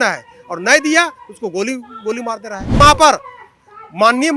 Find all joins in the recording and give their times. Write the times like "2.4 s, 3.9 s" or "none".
2.8 s

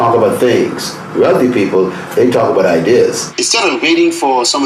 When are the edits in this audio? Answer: 3.3 s

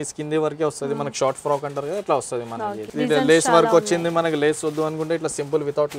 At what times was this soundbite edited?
2.8 s

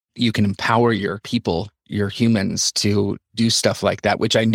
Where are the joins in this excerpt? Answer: 1.8 s

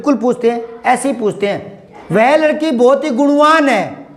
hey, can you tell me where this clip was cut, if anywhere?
2.0 s

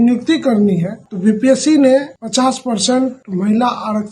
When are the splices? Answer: 1.0 s, 2.2 s, 3.2 s

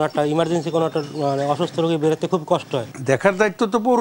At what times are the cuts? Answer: 2.9 s

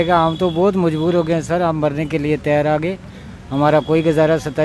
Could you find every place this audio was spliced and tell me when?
none

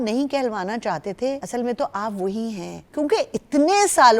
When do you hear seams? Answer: 1.4 s, 2.8 s

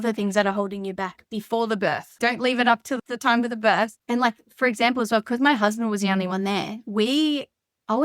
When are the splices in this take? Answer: 2.1 s, 3.0 s, 4.0 s

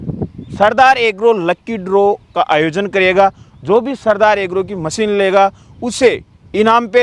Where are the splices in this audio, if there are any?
none

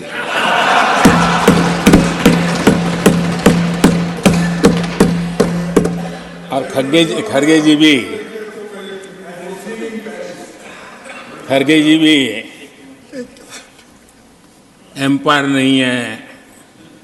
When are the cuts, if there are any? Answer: none

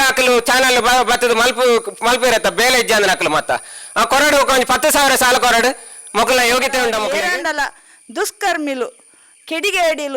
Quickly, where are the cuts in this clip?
7.1 s

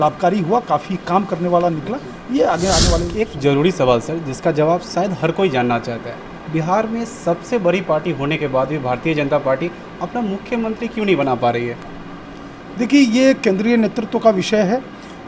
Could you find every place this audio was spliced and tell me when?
3.1 s

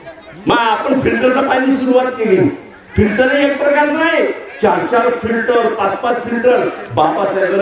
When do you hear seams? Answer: none

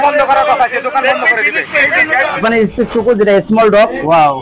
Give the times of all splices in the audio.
2.4 s

